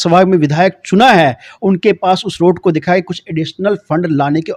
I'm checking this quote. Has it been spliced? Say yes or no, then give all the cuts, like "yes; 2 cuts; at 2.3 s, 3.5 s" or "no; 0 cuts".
no; 0 cuts